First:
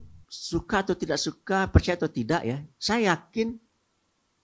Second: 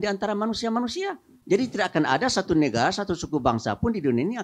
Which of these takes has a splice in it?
second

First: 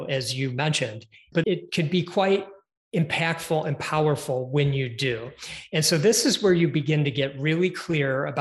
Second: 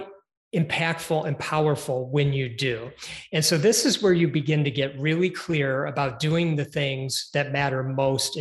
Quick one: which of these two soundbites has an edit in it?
first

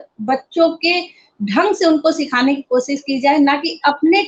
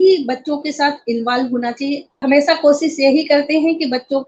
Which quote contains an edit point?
second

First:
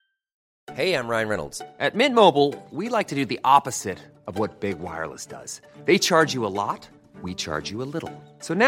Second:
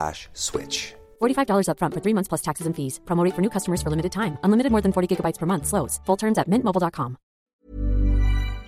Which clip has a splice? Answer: second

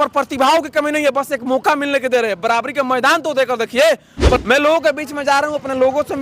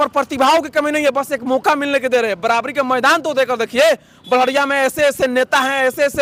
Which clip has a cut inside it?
first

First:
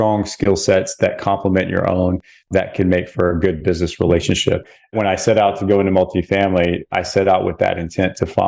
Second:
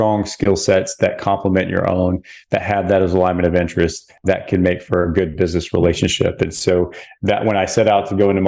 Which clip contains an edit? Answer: first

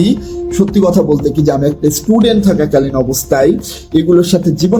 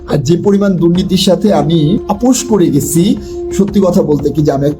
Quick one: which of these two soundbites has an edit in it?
second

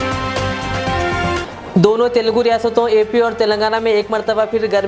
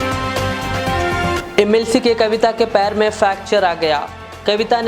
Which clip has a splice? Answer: first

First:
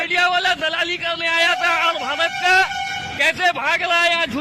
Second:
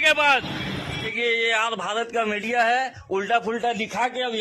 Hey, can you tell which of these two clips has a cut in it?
second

